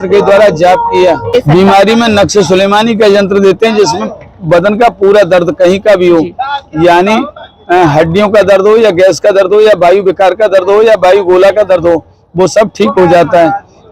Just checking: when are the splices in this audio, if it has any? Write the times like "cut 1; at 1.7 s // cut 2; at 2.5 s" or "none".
cut 1; at 1.3 s